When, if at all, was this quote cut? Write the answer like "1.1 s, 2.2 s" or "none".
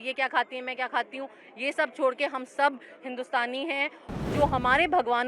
4.0 s